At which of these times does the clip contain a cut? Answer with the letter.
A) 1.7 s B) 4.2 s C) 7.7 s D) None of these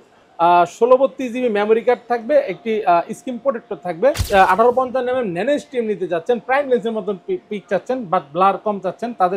B